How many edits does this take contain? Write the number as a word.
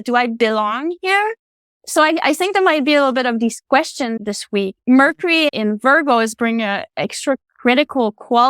two